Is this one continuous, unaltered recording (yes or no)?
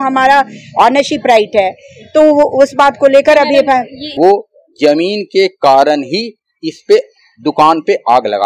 no